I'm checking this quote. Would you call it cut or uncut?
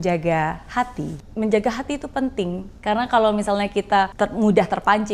cut